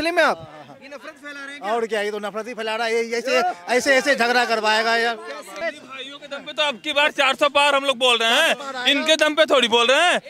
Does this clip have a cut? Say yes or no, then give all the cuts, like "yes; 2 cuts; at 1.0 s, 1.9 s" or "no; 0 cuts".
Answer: yes; 1 cut; at 5.5 s